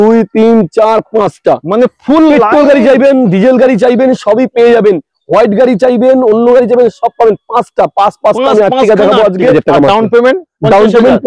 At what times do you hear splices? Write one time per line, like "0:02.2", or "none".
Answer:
0:09.5

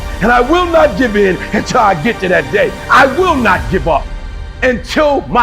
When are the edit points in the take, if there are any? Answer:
0:02.8
0:04.3

